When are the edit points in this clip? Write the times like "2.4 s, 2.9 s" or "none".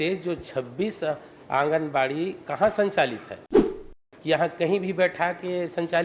3.9 s